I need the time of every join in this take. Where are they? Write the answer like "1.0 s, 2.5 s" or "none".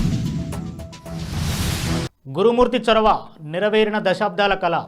2.1 s